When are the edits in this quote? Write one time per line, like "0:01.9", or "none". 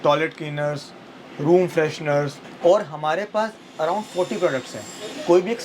0:02.4